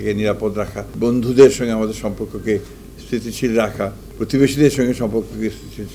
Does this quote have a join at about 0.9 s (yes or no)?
yes